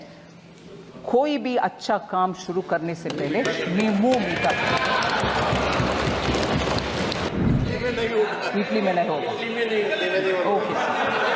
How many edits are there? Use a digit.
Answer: 1